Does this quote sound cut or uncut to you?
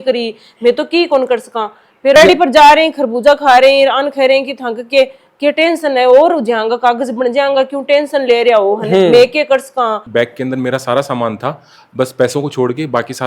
cut